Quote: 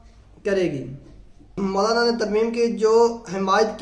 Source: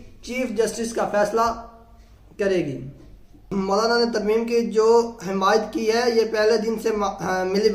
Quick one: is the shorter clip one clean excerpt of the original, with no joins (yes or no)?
yes